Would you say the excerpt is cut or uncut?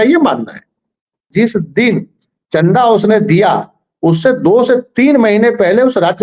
cut